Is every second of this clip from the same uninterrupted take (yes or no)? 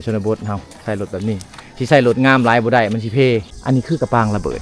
no